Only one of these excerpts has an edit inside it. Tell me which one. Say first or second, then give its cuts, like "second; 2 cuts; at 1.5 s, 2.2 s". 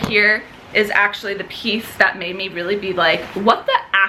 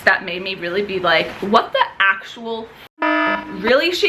second; 1 cut; at 3.1 s